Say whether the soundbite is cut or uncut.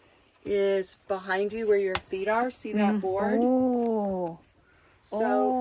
uncut